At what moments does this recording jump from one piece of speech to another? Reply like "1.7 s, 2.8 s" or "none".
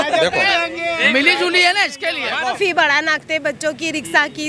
2.5 s